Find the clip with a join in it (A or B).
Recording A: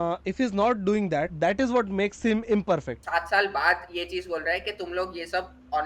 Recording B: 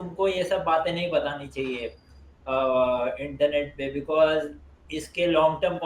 A